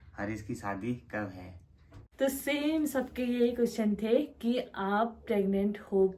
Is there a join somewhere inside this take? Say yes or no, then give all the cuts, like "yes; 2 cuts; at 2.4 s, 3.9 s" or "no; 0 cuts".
yes; 1 cut; at 2.0 s